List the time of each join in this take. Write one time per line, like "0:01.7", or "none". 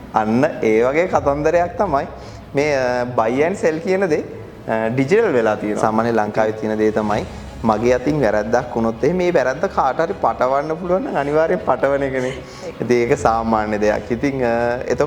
0:05.8

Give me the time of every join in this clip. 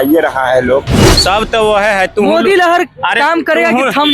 0:01.1

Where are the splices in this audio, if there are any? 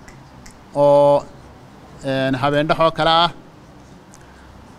none

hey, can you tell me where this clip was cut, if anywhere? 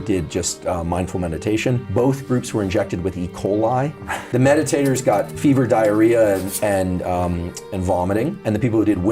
0:04.2

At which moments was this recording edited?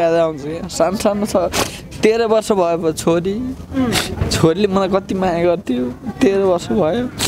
none

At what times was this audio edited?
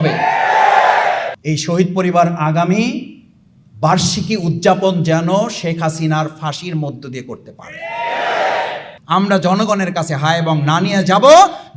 0:01.3
0:08.9

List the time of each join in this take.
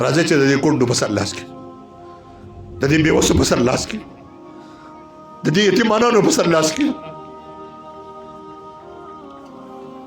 0:01.3
0:02.8
0:04.0
0:05.4
0:07.0

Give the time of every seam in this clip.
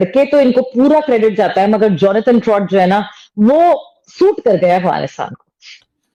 none

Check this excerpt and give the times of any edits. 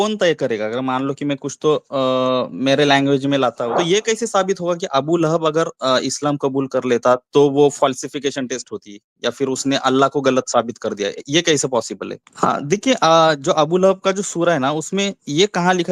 0:03.7
0:12.2

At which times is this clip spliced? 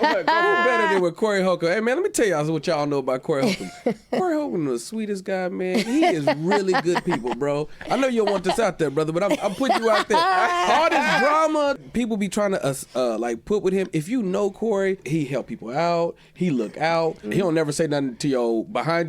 0:11.8
0:15.0
0:17.3

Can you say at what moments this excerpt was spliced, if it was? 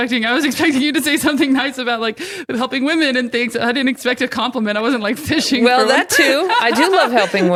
none

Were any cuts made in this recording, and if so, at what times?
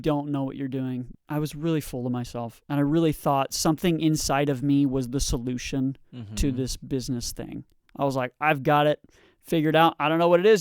0:01.1

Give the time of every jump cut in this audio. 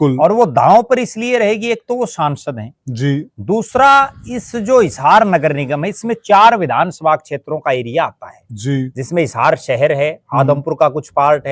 none

